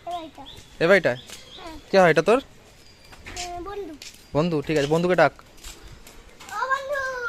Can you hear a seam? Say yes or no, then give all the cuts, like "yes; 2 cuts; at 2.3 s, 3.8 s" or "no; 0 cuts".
no; 0 cuts